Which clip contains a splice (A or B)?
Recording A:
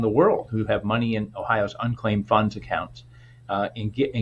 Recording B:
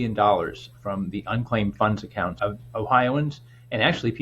B